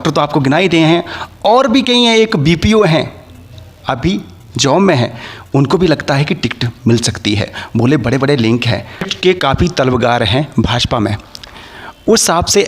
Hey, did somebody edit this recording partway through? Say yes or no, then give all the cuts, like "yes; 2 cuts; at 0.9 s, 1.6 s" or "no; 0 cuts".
yes; 1 cut; at 9.1 s